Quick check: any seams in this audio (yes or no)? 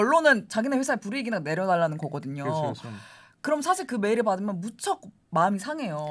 no